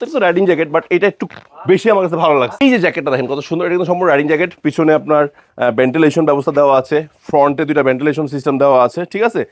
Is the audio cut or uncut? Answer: cut